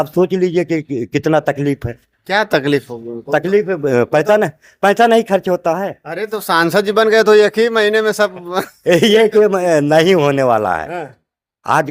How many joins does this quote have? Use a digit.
0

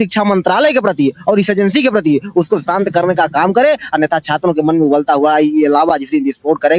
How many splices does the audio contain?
0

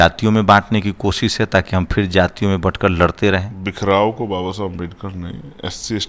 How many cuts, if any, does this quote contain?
1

